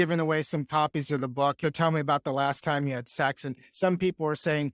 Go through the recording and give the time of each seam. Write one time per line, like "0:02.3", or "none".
0:01.6